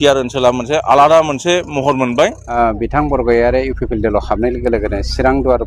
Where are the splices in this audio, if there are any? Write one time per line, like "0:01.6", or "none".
0:02.6